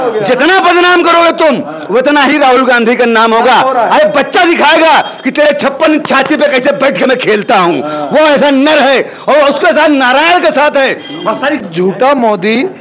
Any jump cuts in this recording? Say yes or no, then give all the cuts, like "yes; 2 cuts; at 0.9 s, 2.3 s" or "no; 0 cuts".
yes; 1 cut; at 11.6 s